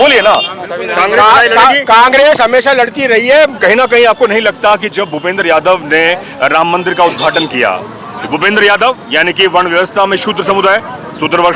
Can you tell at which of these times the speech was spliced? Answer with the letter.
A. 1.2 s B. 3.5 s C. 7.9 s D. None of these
B